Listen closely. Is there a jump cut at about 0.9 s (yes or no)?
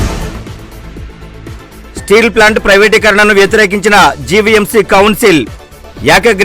yes